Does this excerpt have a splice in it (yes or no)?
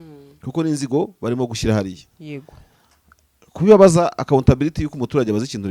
no